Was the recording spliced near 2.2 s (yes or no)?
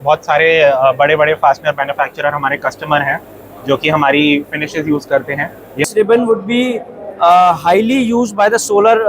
no